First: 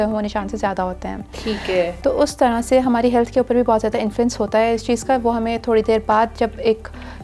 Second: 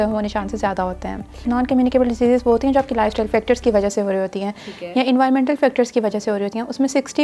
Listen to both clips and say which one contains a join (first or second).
second